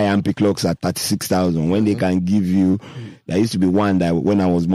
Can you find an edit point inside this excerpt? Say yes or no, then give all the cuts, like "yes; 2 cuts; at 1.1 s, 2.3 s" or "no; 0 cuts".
no; 0 cuts